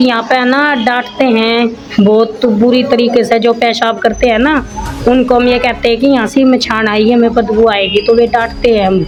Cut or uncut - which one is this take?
uncut